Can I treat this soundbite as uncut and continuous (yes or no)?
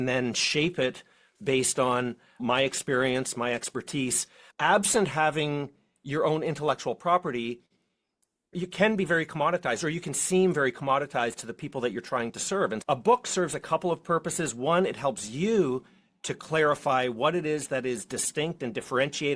no